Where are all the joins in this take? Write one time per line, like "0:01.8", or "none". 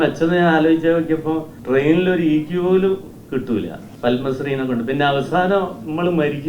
0:01.5
0:03.8